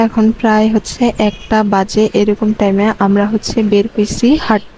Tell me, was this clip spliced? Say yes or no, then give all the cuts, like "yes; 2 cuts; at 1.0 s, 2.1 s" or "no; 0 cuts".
no; 0 cuts